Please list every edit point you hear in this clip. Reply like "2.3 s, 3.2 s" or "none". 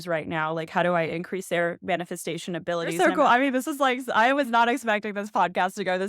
2.9 s